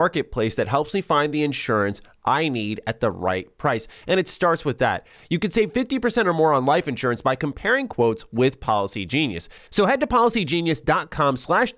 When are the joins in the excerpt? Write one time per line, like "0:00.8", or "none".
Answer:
0:05.1
0:09.5